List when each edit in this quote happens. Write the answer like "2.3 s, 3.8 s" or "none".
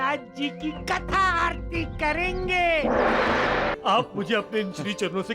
3.7 s